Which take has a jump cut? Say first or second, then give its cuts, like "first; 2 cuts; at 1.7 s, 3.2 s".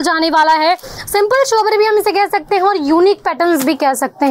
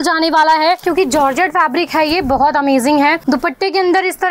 second; 2 cuts; at 0.8 s, 3.2 s